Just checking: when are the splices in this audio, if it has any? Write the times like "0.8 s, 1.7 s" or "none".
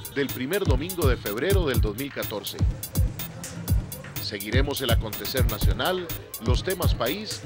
none